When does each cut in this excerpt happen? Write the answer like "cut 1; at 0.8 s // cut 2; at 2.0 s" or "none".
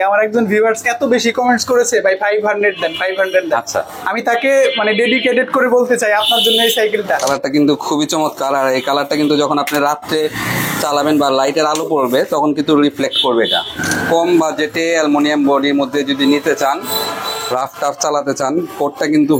cut 1; at 7.2 s // cut 2; at 13.8 s